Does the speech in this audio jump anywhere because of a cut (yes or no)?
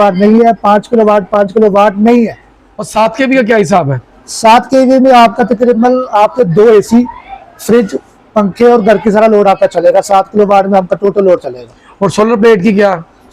yes